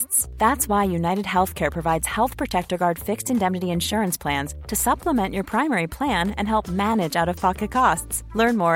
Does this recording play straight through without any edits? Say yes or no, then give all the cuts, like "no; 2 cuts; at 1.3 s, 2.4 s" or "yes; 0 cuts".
yes; 0 cuts